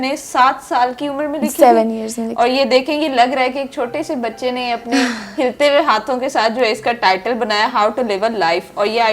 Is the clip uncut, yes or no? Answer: yes